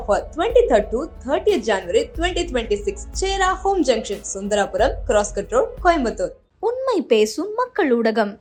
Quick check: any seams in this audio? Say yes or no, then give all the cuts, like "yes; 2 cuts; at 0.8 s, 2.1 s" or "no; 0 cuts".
no; 0 cuts